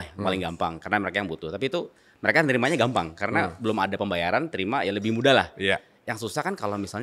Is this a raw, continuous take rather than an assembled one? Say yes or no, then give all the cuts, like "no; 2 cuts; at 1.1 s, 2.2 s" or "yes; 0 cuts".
yes; 0 cuts